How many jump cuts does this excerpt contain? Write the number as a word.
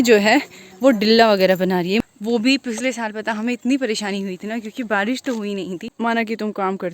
two